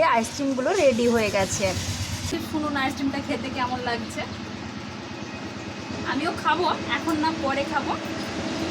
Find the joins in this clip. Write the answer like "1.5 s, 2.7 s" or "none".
2.3 s